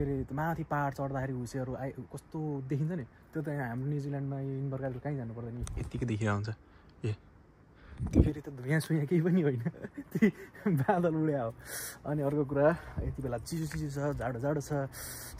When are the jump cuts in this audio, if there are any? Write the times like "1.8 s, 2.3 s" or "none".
none